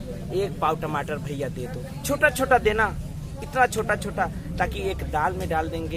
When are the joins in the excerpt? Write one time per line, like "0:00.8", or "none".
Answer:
none